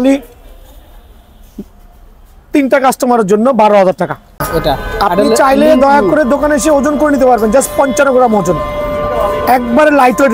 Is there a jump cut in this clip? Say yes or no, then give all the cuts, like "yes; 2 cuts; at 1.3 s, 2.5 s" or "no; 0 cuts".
yes; 1 cut; at 4.3 s